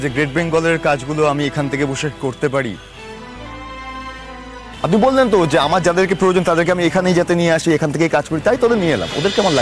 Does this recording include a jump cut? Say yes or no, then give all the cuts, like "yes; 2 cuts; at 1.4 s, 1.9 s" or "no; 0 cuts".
no; 0 cuts